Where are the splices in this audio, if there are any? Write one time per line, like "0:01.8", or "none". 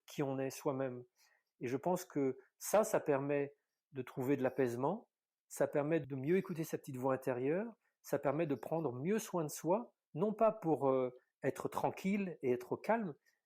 0:06.0